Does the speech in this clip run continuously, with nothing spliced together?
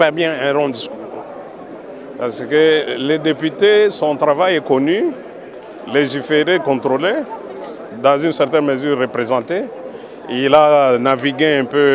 yes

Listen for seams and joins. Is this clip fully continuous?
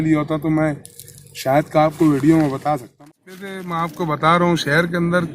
no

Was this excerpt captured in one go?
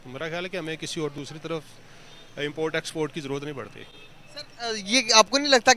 yes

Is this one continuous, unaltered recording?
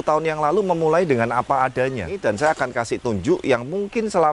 no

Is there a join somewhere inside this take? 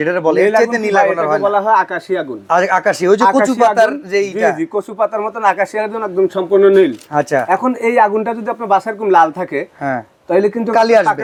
no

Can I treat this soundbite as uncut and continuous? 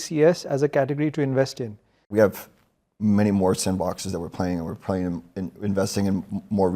no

